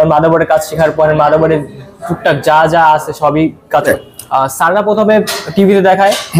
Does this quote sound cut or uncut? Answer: cut